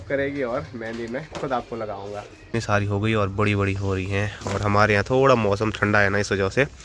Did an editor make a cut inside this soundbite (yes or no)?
yes